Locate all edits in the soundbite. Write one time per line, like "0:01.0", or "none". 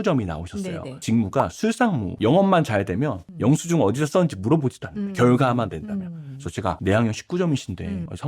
0:01.0
0:02.1
0:06.8